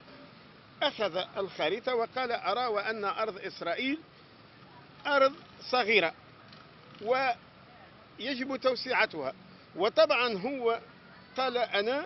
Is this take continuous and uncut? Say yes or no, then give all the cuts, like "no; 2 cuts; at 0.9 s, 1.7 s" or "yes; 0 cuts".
yes; 0 cuts